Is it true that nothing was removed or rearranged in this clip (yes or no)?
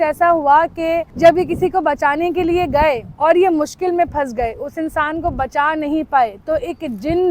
no